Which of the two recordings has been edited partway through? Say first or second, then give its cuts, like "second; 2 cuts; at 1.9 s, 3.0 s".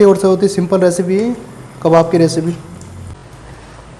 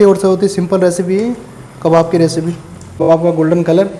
second; 1 cut; at 3.1 s